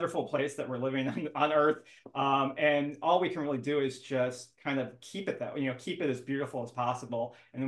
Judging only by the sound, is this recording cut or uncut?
uncut